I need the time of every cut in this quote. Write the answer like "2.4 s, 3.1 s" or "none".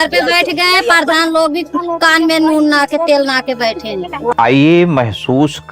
4.3 s